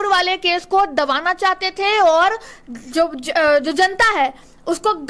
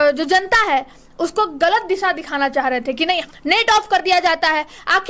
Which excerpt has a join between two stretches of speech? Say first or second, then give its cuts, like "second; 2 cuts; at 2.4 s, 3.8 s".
second; 1 cut; at 3.2 s